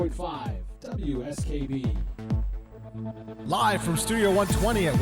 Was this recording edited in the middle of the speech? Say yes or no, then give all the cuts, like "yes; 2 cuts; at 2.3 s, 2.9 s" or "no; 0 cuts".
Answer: yes; 1 cut; at 2.5 s